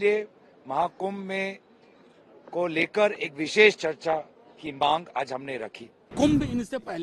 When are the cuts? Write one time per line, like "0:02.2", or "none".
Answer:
0:06.1